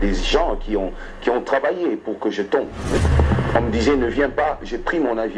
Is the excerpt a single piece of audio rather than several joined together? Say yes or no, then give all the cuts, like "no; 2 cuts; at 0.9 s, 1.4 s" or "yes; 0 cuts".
no; 1 cut; at 3.0 s